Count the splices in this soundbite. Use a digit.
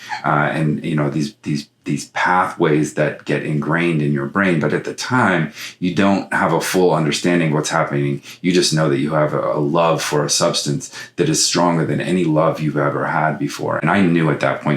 1